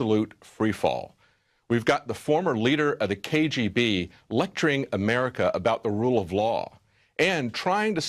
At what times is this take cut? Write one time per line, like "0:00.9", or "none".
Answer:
0:03.9